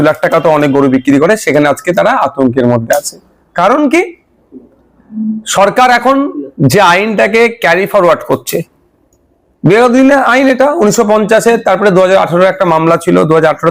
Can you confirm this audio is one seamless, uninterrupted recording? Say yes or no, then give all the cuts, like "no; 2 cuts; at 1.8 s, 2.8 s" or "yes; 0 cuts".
yes; 0 cuts